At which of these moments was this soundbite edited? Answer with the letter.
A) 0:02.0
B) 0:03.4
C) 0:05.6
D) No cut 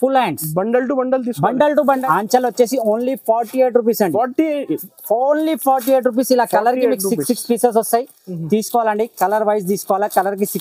A